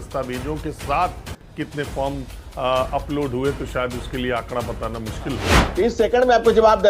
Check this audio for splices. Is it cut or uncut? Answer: cut